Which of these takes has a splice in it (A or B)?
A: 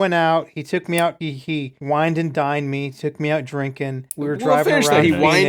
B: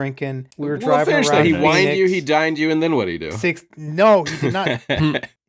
B